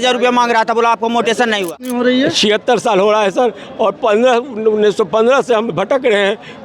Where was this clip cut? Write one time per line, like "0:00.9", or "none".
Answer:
0:01.7

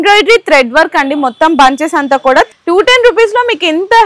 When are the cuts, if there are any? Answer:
0:02.5

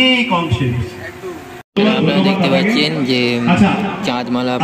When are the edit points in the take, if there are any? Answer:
0:01.7

